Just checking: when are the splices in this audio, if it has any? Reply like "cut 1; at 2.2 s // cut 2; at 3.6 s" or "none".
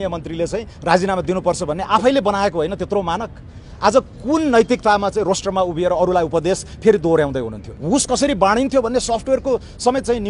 cut 1; at 7.8 s